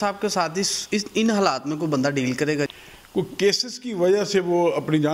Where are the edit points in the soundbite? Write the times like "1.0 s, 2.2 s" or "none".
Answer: 2.7 s